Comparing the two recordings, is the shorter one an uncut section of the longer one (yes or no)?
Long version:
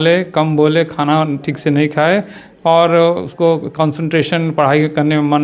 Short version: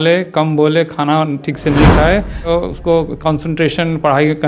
no